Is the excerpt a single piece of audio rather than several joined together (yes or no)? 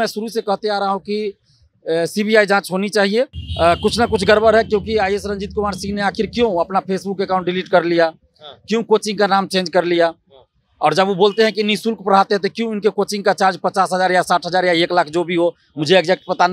no